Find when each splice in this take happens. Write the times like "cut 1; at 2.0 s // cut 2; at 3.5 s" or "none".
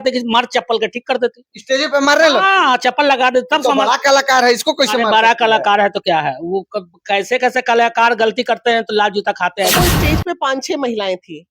cut 1; at 9.8 s